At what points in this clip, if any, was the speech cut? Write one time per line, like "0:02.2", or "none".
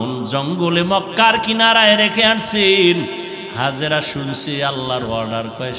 none